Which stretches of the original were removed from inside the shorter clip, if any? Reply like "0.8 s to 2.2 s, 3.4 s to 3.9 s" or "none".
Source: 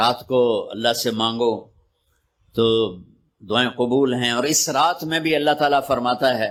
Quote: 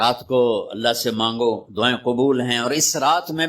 1.7 s to 3.4 s